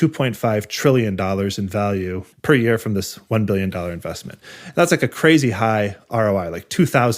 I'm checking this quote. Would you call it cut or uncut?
cut